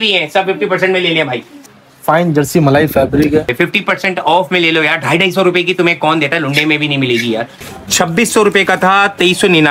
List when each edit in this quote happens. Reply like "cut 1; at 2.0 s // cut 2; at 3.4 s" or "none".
cut 1; at 1.5 s // cut 2; at 3.5 s // cut 3; at 7.6 s